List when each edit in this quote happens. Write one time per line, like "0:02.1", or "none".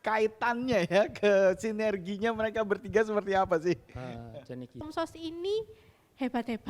0:04.9